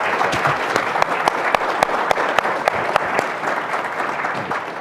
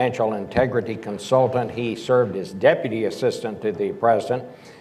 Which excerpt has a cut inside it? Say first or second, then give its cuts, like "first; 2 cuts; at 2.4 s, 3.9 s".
second; 1 cut; at 1.7 s